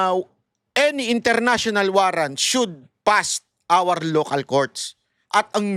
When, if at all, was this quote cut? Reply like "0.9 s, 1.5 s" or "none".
none